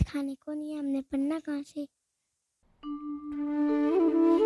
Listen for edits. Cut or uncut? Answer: uncut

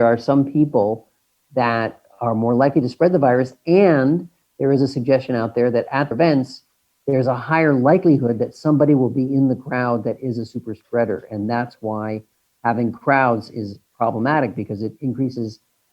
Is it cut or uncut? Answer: cut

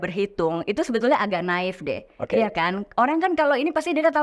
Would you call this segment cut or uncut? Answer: uncut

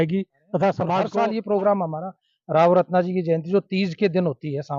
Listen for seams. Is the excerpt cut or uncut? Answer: cut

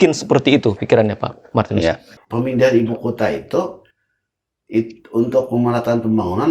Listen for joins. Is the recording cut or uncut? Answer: cut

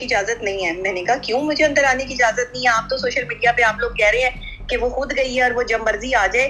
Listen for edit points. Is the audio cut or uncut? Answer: uncut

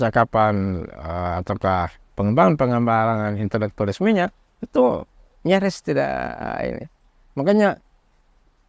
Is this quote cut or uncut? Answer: uncut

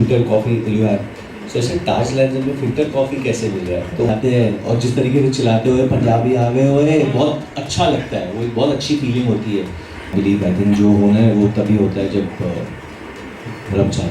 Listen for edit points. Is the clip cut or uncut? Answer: cut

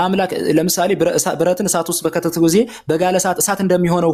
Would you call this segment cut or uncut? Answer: uncut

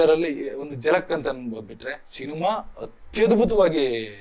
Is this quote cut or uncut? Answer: uncut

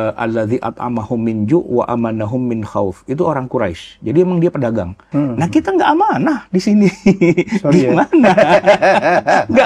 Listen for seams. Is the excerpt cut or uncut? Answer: cut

